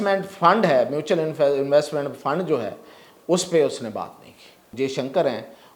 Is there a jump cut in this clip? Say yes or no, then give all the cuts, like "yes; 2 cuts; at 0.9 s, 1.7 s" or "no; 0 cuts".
yes; 1 cut; at 4.7 s